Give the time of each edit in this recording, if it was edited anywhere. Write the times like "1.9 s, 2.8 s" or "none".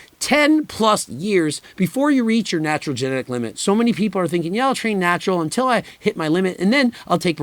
3.5 s

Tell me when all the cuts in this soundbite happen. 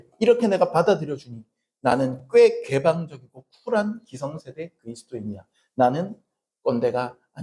none

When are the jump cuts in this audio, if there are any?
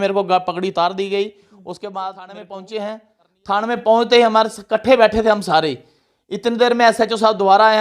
2.5 s

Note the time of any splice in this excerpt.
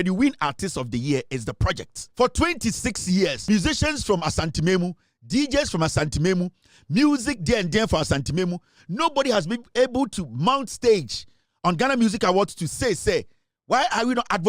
2.0 s, 3.4 s

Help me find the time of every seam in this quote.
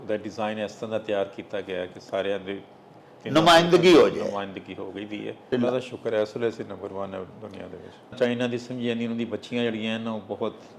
5.5 s, 8.1 s

